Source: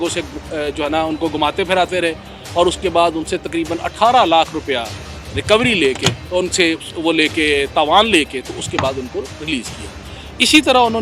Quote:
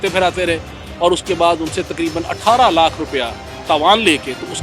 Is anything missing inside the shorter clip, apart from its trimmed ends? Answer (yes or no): yes